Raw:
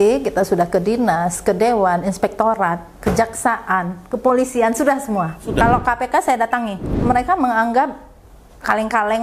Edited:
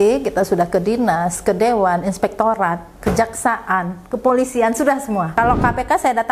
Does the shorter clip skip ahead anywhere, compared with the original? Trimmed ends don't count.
yes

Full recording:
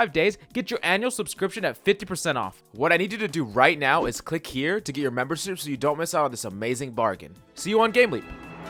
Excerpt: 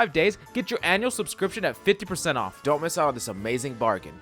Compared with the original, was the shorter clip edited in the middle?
yes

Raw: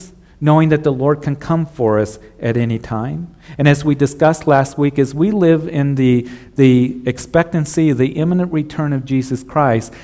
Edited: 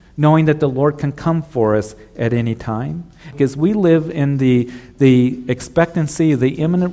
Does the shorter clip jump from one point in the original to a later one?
yes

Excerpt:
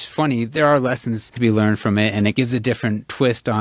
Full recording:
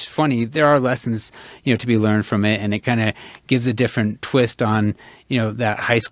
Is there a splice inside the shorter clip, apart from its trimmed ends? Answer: yes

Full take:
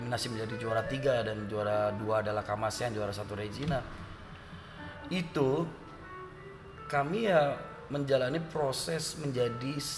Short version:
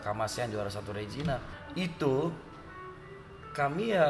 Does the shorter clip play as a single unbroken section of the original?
no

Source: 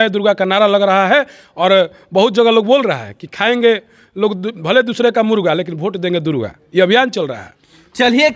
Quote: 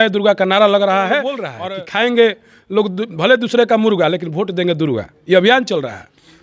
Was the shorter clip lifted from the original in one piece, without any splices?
no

